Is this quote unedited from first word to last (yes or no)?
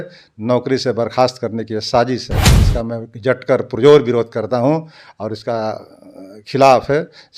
yes